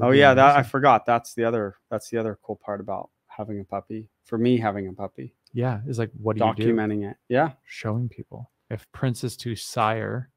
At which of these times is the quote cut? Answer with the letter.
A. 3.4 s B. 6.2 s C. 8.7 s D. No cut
C